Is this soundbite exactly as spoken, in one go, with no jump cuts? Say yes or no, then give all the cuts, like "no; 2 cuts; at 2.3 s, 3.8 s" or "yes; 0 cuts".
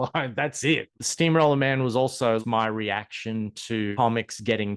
no; 3 cuts; at 0.9 s, 2.4 s, 3.9 s